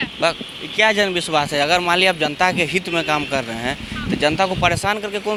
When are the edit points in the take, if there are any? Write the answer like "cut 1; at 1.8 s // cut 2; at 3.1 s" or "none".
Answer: none